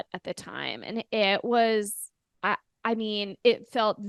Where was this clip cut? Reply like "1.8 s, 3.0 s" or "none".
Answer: none